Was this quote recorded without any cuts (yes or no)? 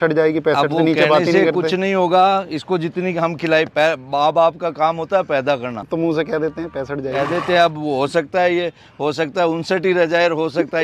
no